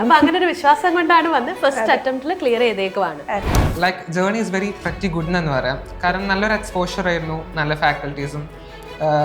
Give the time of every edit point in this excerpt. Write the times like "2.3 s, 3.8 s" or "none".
3.6 s